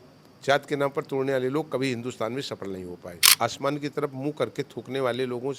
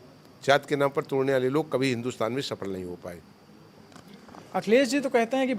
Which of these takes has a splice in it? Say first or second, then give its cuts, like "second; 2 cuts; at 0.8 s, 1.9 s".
first; 1 cut; at 3.2 s